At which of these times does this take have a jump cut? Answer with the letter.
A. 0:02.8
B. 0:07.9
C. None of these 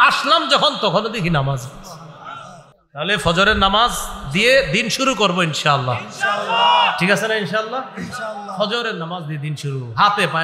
A